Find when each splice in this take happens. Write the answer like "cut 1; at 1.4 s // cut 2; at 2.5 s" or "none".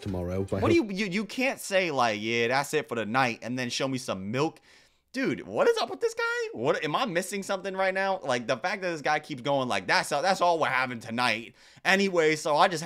none